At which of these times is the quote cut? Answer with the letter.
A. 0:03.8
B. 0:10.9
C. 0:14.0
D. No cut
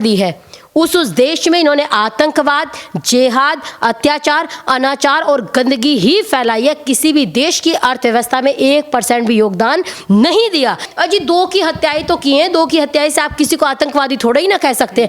B